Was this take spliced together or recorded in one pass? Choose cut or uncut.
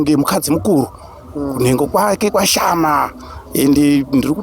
uncut